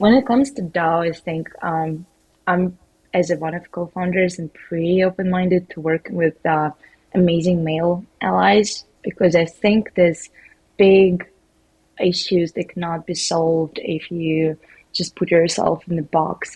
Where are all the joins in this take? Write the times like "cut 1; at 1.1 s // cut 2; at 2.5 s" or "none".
none